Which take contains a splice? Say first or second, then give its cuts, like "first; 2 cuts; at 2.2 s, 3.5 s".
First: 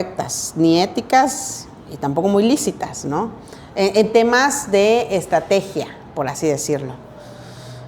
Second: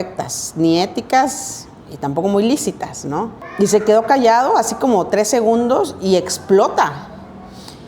second; 1 cut; at 3.4 s